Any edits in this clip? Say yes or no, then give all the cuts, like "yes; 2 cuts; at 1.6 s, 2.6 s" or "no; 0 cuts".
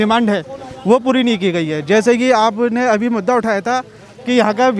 no; 0 cuts